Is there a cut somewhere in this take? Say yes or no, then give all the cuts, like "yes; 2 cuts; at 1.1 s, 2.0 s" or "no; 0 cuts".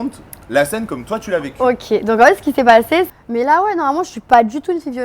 yes; 1 cut; at 3.2 s